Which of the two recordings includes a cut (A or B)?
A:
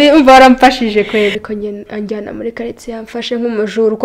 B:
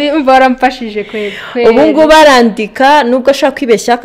A